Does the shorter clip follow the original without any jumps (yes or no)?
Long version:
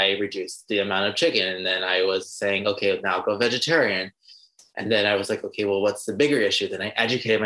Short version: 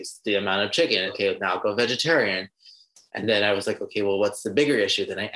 no